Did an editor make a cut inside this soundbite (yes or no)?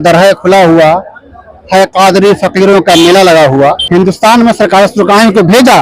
yes